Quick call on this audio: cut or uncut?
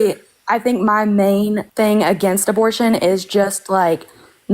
cut